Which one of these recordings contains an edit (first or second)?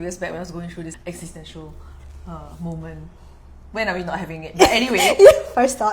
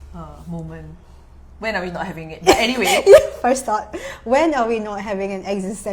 first